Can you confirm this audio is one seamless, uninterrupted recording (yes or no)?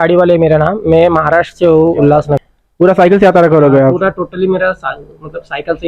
no